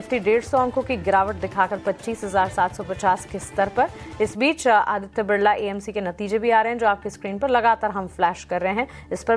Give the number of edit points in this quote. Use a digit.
1